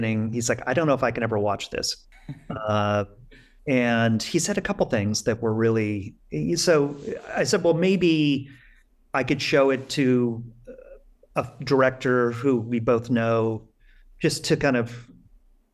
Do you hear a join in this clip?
no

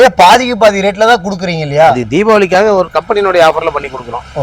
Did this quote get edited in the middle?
no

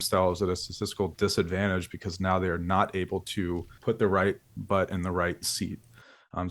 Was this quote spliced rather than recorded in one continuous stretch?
yes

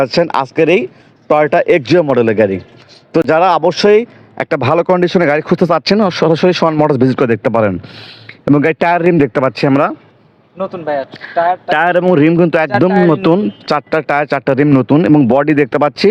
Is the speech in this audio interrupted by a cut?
no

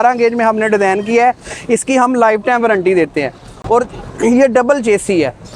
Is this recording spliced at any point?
no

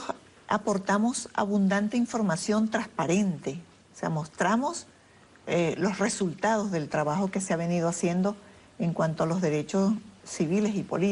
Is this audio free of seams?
no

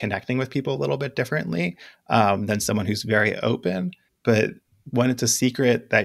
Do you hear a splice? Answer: yes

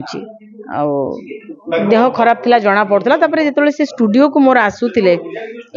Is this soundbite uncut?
yes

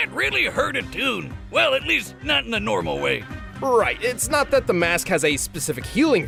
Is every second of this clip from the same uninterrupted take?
yes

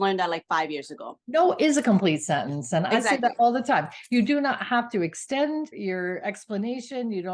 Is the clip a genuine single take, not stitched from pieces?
no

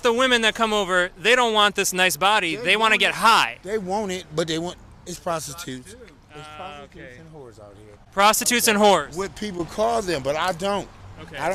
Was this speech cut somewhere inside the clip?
no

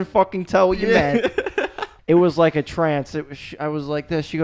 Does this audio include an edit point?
yes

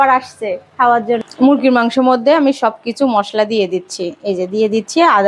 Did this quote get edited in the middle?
yes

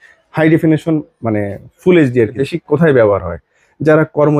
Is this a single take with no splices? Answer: no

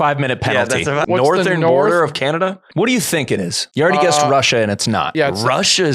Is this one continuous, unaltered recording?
no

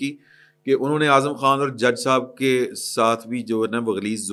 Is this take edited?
no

